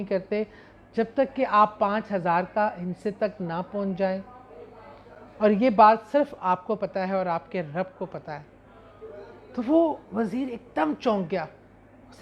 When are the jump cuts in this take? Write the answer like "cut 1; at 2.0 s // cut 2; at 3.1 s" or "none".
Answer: none